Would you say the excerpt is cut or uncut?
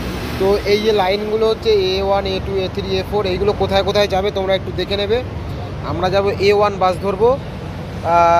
uncut